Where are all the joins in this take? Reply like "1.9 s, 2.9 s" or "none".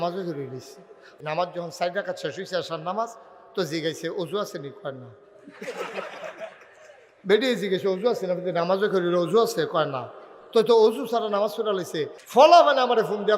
1.1 s, 12.2 s